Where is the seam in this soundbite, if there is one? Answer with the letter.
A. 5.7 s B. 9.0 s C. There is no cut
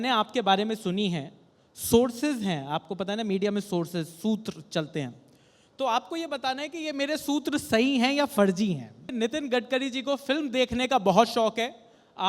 B